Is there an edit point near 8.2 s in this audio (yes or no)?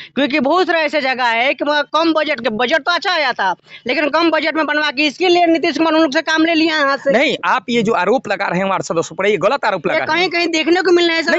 no